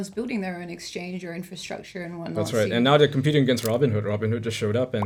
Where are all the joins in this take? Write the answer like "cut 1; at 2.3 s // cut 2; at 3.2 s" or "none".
none